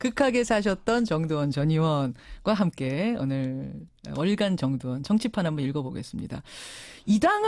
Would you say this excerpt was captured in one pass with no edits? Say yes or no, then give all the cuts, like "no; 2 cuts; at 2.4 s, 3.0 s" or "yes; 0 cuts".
no; 1 cut; at 1.0 s